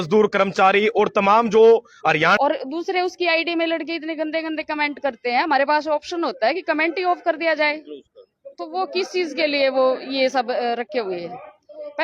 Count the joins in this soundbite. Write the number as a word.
one